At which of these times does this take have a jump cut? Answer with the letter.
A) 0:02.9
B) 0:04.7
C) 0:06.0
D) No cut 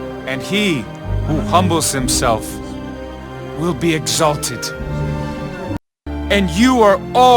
C